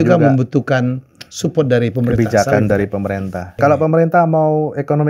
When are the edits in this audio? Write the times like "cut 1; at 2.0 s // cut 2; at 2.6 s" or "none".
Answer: cut 1; at 3.5 s